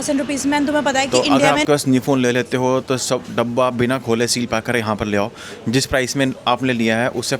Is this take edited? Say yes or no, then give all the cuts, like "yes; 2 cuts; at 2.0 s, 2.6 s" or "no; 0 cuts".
yes; 1 cut; at 1.6 s